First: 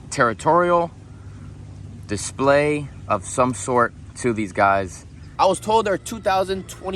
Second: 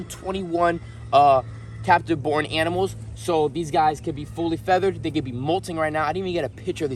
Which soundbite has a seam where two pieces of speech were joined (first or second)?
first